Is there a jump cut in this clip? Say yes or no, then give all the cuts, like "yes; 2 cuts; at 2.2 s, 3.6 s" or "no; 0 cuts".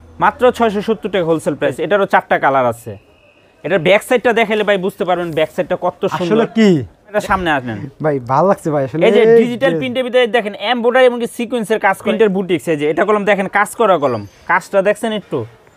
yes; 3 cuts; at 1.7 s, 7.1 s, 12.1 s